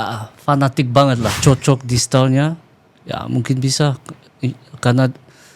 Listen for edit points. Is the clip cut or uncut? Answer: cut